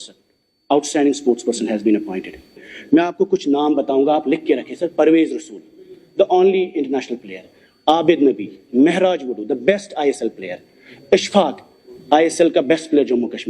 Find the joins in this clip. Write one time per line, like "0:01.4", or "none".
0:02.6